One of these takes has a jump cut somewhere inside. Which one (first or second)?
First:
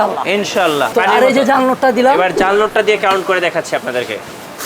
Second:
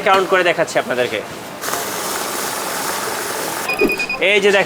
first